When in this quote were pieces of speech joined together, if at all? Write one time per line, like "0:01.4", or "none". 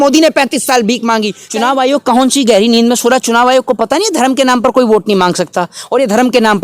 0:01.4